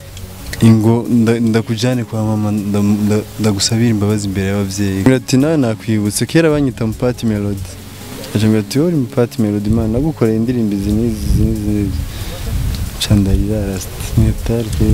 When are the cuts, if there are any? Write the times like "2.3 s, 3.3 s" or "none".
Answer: 5.1 s